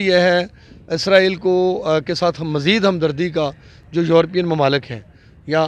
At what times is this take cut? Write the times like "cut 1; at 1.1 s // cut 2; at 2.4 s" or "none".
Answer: none